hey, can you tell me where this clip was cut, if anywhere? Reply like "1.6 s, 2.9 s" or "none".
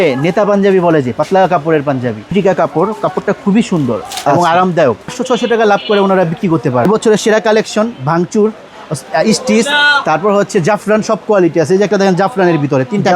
2.3 s, 5.2 s, 6.8 s